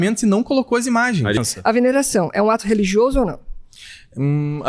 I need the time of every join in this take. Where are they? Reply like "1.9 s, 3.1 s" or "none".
1.4 s